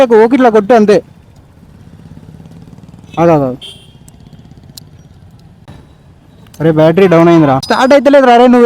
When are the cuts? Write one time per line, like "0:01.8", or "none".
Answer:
0:07.7